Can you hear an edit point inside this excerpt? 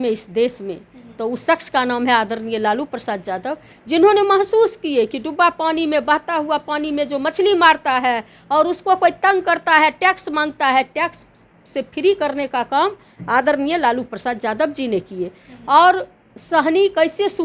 no; 0 cuts

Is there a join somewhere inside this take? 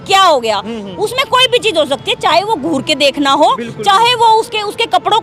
no; 0 cuts

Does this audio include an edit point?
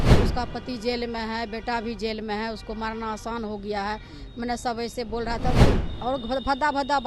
yes; 1 cut; at 5.6 s

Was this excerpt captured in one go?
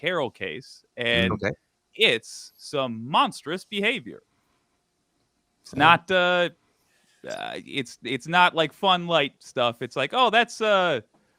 yes; 0 cuts

